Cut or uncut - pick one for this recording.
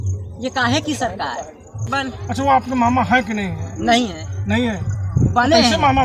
cut